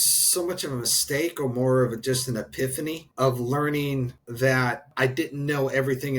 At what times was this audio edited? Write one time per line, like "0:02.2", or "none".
0:03.0
0:04.2
0:04.9